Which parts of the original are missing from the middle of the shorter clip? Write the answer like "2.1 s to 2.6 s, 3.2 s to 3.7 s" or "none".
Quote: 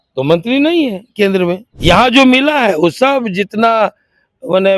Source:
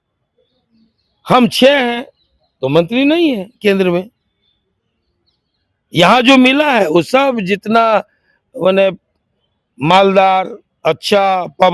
4.1 s to 5.8 s